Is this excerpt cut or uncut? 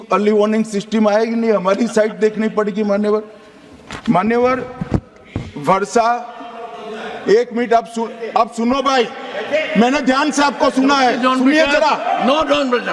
uncut